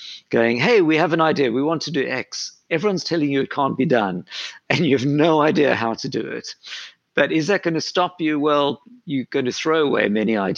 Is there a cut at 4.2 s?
no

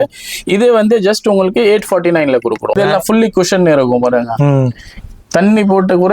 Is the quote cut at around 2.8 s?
yes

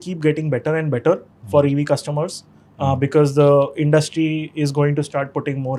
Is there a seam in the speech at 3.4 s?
no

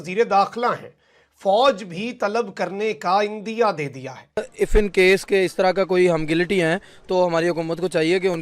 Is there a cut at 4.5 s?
yes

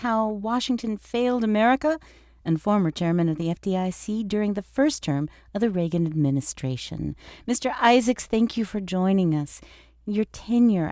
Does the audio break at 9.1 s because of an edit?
no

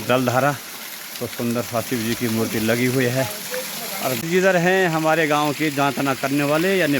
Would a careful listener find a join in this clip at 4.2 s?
yes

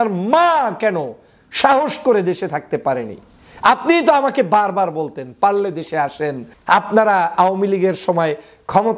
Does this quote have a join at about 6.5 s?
yes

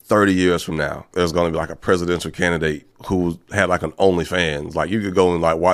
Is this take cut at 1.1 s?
yes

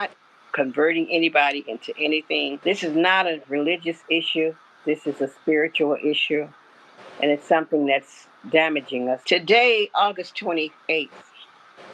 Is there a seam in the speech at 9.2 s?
yes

